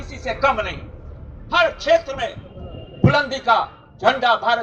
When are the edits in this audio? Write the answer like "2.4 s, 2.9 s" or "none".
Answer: none

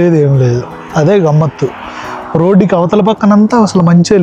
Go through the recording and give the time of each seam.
none

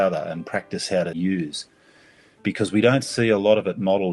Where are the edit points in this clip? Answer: 1.1 s

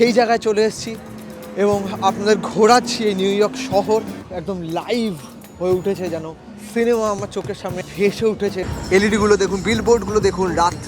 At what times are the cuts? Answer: 4.2 s, 7.9 s, 8.7 s

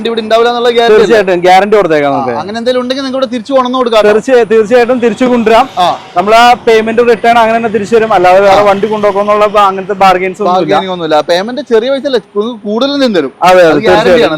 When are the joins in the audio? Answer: none

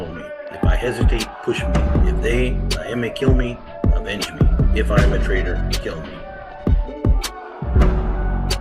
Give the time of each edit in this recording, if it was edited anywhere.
6.3 s

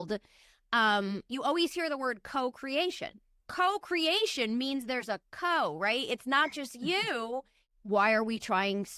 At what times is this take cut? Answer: 3.3 s, 7.6 s

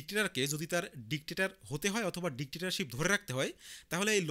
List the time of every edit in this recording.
none

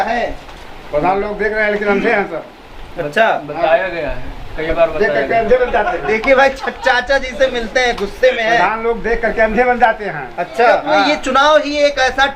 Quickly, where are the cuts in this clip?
10.9 s

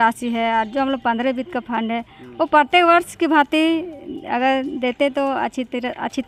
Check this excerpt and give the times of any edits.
none

